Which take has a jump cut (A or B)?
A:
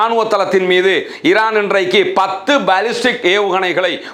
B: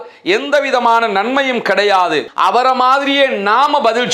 B